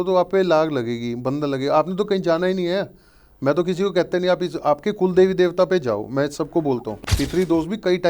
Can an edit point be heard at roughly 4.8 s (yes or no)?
no